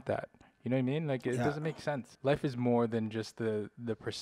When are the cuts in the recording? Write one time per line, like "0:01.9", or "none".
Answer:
0:02.1